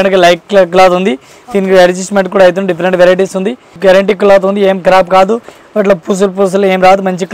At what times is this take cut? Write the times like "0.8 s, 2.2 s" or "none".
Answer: 3.7 s